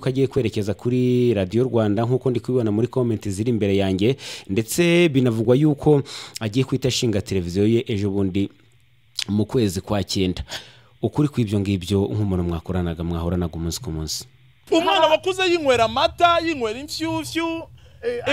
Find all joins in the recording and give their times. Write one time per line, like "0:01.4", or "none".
0:14.7